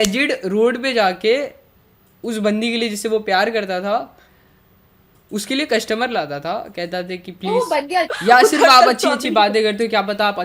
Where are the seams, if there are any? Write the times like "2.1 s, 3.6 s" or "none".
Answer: 8.1 s